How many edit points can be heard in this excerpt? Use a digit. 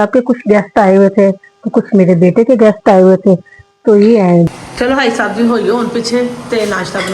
1